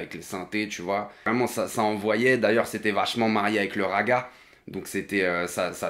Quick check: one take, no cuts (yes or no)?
no